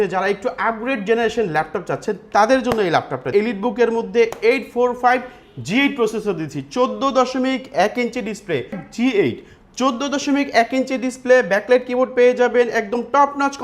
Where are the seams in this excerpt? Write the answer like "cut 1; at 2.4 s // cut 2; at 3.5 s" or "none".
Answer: cut 1; at 3.3 s // cut 2; at 8.8 s